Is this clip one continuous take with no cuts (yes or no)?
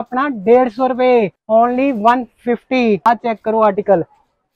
no